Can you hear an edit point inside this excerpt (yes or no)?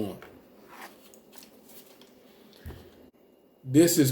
yes